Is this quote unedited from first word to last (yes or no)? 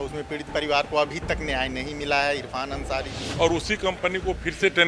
no